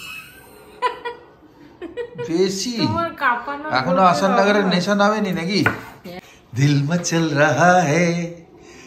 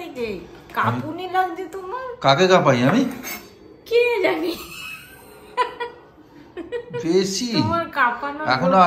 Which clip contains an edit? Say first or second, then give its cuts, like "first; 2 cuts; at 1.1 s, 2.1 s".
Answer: first; 1 cut; at 6.2 s